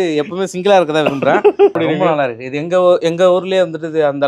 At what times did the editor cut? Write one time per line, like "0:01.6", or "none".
0:01.7